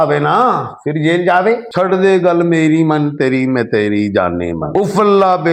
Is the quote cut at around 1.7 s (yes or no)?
yes